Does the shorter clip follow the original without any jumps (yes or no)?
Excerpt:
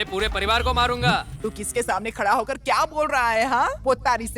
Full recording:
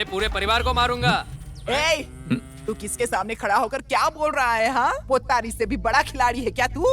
no